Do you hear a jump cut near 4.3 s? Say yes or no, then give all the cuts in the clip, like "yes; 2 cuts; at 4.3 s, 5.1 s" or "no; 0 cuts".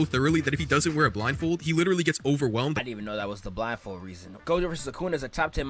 yes; 2 cuts; at 2.8 s, 4.3 s